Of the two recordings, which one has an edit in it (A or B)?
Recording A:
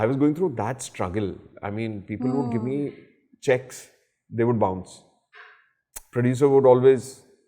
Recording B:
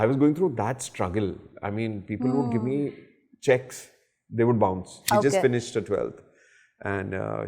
B